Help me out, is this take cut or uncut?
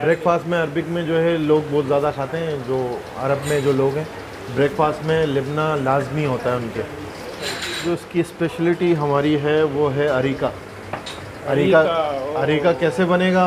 cut